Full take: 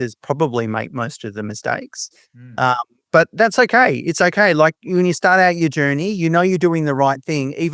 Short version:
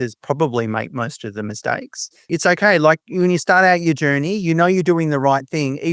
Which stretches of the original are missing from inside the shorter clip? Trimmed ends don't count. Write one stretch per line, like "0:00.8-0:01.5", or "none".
0:02.2-0:04.0